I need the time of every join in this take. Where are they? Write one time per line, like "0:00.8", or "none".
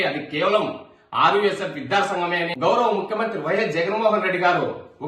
0:02.5